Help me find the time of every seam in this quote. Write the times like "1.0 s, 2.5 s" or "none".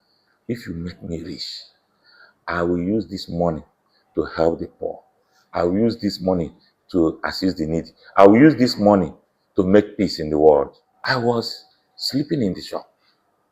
10.9 s